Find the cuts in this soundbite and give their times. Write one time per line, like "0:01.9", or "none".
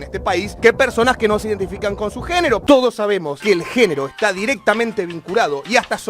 0:02.6